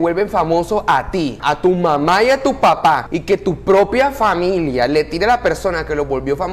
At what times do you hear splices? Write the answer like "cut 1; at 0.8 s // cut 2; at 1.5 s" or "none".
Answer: cut 1; at 1.4 s // cut 2; at 3.1 s